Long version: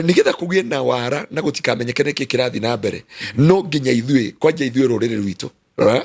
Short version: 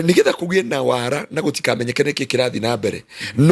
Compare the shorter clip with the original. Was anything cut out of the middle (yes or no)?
no